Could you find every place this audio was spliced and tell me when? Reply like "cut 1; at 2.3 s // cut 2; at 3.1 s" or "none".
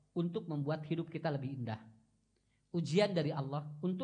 none